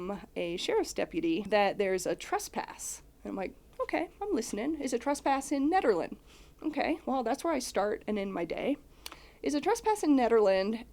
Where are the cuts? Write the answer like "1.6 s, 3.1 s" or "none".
1.5 s